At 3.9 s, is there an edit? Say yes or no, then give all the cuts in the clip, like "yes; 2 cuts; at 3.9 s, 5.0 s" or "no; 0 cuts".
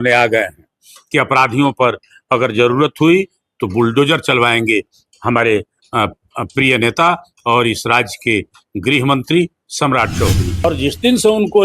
no; 1 cut; at 10.6 s